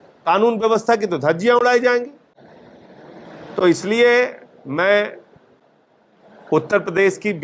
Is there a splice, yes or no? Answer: no